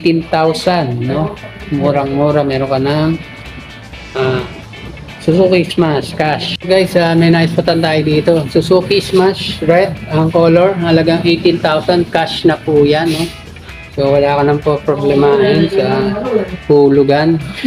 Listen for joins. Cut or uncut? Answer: cut